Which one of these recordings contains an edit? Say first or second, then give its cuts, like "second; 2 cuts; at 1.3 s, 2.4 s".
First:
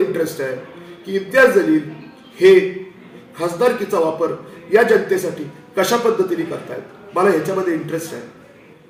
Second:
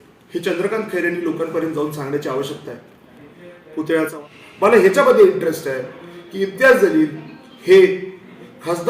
second; 1 cut; at 4.1 s